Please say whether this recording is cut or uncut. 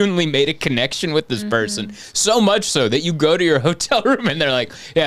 uncut